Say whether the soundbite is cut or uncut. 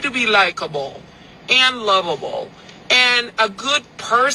uncut